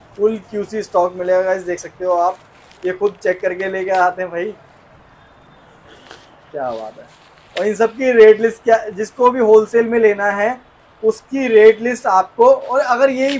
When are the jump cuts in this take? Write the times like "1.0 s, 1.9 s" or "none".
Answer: none